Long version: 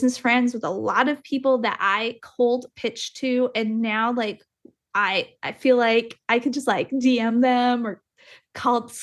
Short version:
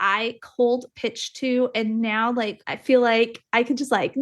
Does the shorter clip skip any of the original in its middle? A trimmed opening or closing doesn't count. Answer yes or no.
yes